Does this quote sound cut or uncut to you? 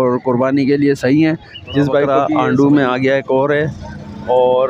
cut